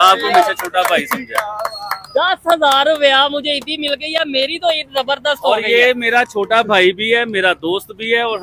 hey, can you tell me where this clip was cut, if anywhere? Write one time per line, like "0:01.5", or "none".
none